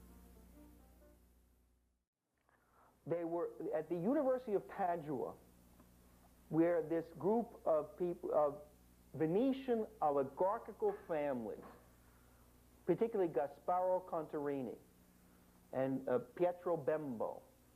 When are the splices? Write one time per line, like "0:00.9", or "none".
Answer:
none